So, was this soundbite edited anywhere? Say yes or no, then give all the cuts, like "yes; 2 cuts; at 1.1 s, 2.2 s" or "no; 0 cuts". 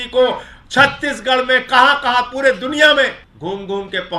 yes; 1 cut; at 3.3 s